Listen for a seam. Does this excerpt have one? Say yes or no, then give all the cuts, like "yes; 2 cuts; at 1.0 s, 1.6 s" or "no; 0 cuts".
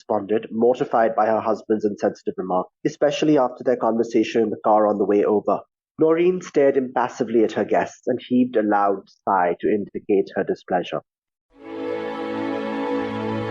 yes; 1 cut; at 11.2 s